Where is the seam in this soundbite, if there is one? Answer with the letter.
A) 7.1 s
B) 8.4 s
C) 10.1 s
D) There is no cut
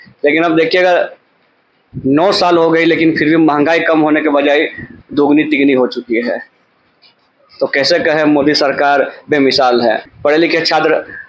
C